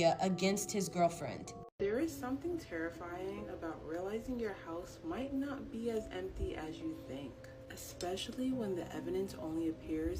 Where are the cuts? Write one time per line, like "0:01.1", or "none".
0:01.7

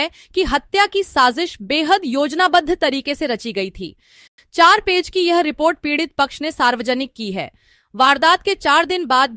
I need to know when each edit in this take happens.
none

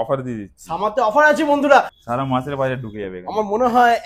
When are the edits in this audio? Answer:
0:01.9

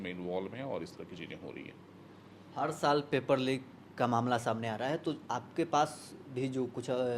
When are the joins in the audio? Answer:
none

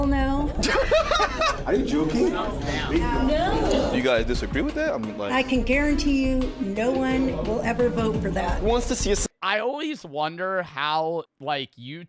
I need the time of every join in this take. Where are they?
0:02.6

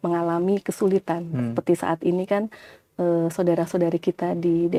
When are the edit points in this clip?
none

